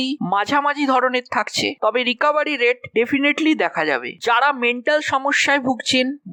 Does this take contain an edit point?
no; 0 cuts

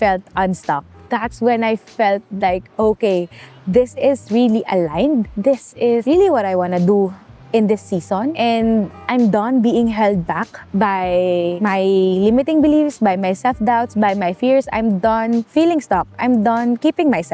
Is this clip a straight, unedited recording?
yes; 0 cuts

